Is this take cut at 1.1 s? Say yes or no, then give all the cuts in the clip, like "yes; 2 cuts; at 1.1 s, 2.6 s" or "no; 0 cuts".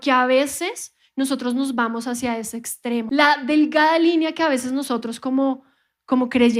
no; 1 cut; at 3.1 s